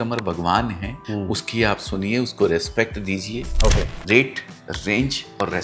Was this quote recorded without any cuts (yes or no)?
no